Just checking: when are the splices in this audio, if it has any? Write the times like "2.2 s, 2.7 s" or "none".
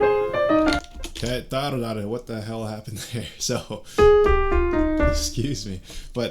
none